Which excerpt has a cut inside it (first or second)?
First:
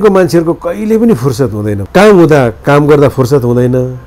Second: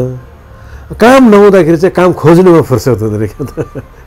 first